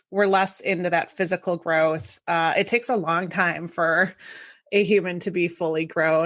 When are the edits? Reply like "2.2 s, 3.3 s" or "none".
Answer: none